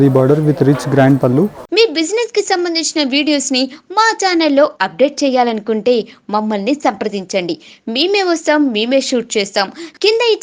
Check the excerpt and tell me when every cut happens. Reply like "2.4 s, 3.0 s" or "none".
1.6 s